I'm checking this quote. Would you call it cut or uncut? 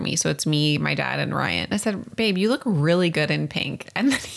cut